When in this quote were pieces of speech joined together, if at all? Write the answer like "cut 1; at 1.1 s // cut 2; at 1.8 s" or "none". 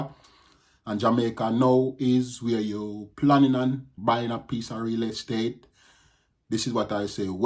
cut 1; at 3.9 s